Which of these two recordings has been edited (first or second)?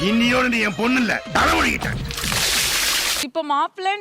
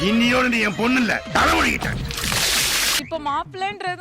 second